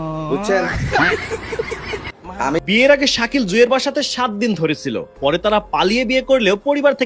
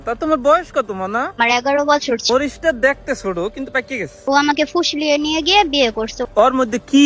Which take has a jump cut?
first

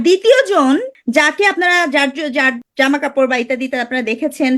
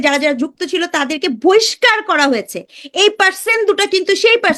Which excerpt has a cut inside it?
first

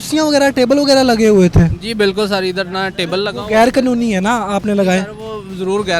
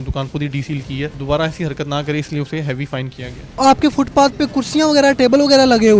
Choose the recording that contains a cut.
second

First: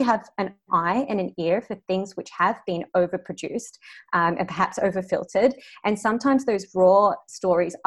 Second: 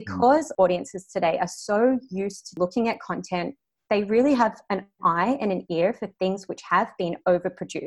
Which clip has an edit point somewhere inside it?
second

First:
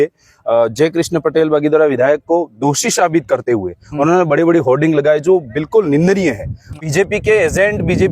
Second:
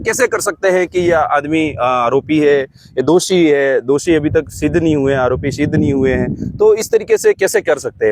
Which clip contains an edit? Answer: first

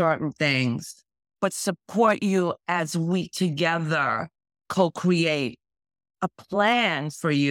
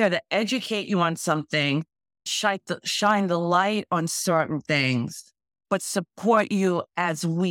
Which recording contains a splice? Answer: second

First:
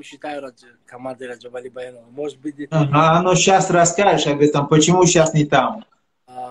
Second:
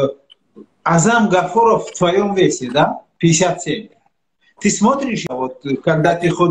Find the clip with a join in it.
second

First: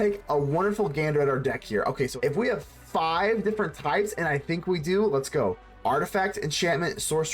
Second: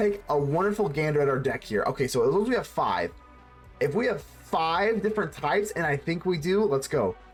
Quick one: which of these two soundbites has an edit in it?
first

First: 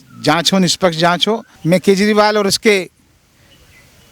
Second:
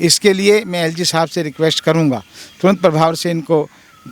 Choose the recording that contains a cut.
first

